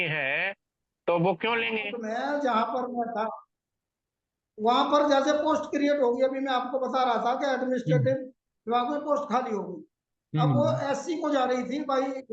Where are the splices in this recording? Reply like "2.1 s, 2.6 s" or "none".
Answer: 2.0 s